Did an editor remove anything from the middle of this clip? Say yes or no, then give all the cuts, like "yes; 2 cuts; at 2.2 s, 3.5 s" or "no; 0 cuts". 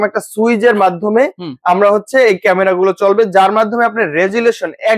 no; 0 cuts